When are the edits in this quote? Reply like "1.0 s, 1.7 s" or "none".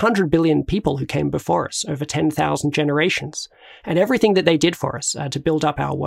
none